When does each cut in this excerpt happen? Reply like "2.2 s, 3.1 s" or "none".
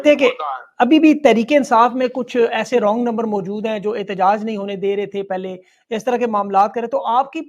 none